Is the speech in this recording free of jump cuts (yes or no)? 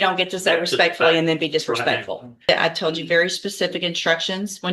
no